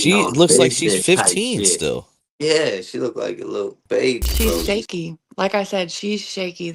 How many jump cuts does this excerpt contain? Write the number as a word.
one